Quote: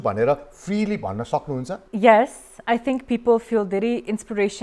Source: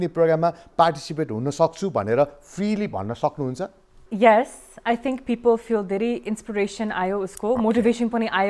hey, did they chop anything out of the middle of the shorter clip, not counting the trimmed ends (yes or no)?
yes